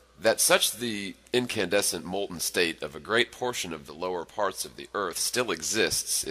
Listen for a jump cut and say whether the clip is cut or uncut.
cut